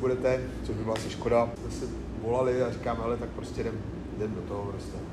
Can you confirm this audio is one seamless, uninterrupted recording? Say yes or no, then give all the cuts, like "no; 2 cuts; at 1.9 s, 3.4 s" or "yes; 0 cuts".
yes; 0 cuts